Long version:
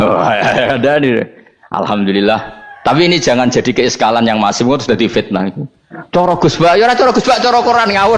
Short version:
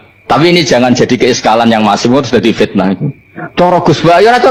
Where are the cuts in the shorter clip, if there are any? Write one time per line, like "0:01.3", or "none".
none